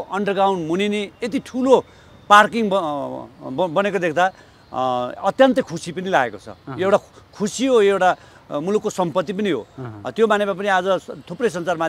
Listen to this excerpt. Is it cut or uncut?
uncut